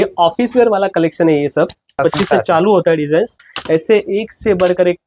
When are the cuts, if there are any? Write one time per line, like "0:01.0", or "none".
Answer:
0:02.0